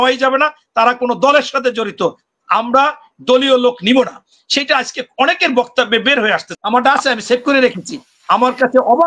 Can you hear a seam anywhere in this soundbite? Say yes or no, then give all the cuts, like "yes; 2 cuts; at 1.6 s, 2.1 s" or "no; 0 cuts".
yes; 1 cut; at 6.5 s